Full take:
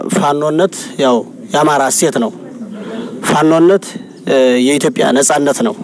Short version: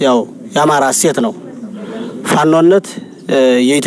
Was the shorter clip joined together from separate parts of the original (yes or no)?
no